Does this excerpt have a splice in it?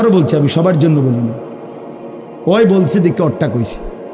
no; 0 cuts

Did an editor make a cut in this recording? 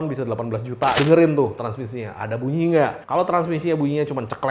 yes; 1 cut; at 1.0 s

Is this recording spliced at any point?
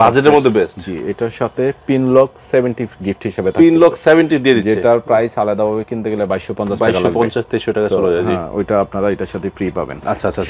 no; 0 cuts

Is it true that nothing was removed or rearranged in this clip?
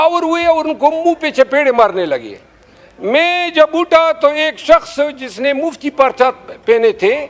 yes; 0 cuts

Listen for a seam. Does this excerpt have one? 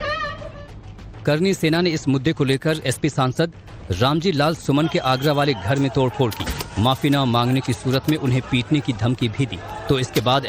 yes; 1 cut; at 8.8 s

